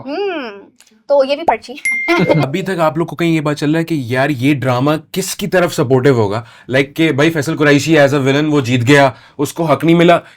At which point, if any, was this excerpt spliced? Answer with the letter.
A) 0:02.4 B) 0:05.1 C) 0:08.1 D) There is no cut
A